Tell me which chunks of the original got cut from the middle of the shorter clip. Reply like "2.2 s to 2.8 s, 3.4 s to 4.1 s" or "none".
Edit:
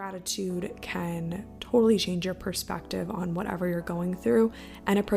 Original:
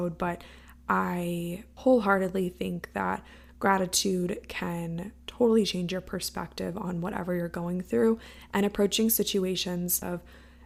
none